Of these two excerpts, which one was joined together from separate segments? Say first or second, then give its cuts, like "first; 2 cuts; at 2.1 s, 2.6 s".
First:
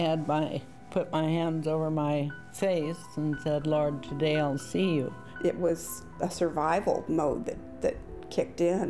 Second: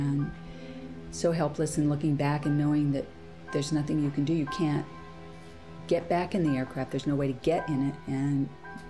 first; 1 cut; at 5.2 s